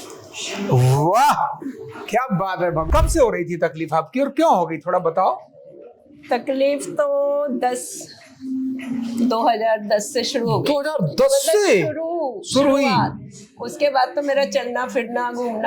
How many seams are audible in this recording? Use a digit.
1